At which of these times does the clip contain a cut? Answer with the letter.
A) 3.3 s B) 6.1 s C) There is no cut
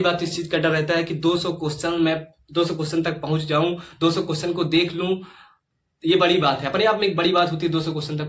C